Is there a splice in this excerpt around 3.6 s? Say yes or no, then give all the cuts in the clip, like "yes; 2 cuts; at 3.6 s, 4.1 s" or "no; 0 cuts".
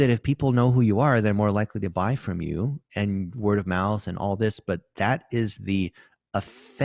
no; 0 cuts